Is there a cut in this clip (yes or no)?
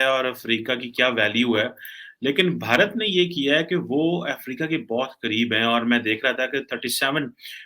no